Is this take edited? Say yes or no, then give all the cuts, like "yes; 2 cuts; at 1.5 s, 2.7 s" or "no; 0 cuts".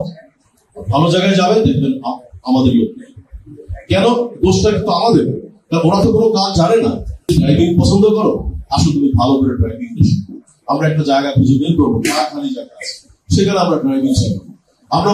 yes; 1 cut; at 7.2 s